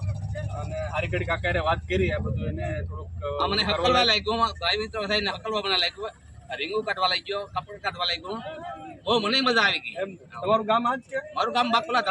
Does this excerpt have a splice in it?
no; 0 cuts

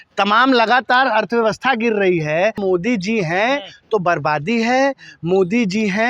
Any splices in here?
yes; 1 cut; at 2.6 s

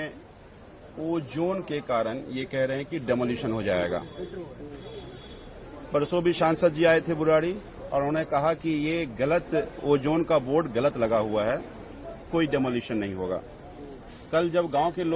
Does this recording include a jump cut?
no; 0 cuts

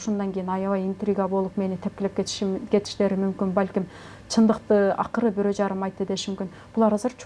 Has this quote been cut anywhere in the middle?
no; 0 cuts

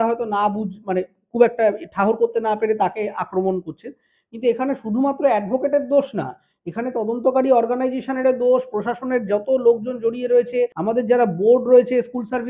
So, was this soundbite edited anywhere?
yes; 1 cut; at 10.8 s

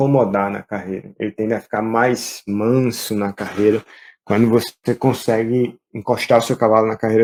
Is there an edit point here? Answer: no; 0 cuts

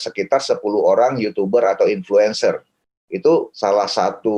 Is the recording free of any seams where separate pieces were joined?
no; 1 cut; at 3.5 s

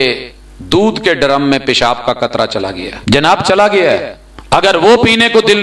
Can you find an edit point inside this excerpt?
yes; 2 cuts; at 2.9 s, 3.8 s

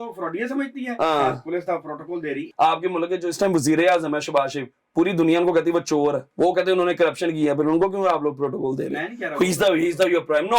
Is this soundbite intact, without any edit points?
no; 2 cuts; at 2.4 s, 6.3 s

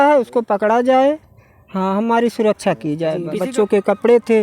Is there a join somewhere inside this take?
yes; 1 cut; at 3.3 s

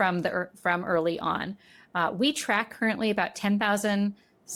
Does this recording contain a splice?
no; 0 cuts

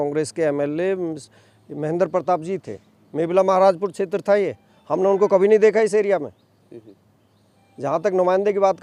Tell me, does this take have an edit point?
no; 0 cuts

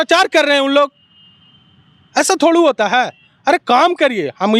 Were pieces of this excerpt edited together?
no; 0 cuts

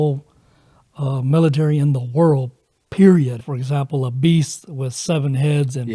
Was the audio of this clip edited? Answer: yes; 1 cut; at 3.4 s

